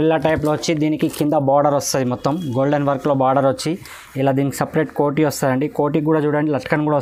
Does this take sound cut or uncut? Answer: uncut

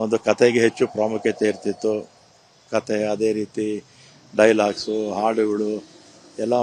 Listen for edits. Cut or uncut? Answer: cut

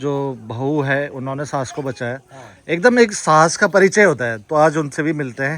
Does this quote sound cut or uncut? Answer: uncut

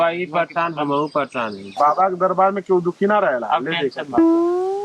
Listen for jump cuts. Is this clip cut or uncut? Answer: cut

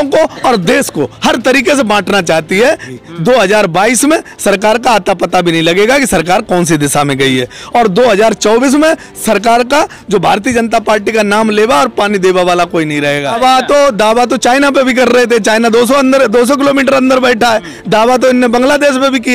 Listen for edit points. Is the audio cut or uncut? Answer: cut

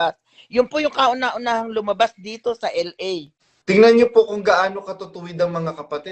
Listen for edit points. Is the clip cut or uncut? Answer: cut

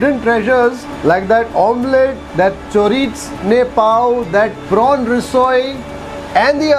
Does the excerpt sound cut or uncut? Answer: uncut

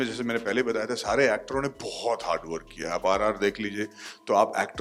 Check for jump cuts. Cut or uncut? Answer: uncut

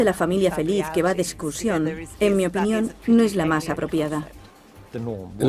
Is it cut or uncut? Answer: uncut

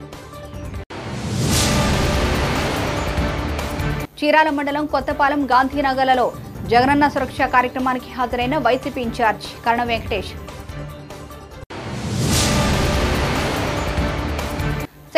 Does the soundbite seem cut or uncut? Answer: cut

